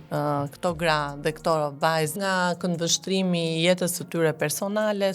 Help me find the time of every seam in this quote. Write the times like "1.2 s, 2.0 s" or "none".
2.1 s